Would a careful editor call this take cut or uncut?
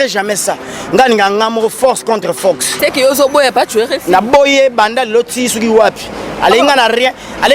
cut